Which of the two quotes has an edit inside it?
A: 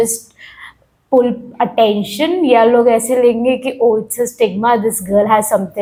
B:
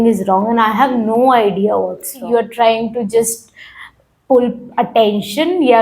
B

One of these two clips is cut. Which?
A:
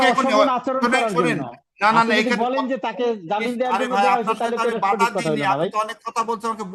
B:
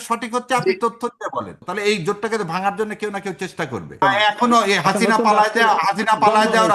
B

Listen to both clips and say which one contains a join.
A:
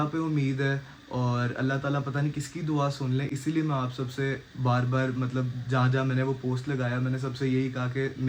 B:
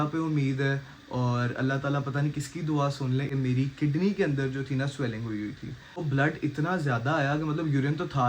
B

